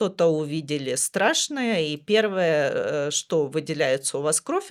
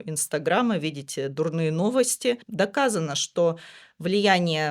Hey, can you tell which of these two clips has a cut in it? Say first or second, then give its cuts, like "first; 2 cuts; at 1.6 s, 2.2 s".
second; 1 cut; at 2.5 s